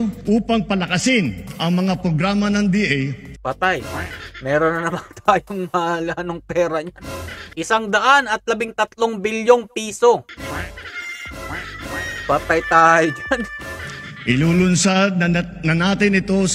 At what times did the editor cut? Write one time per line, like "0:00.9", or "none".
none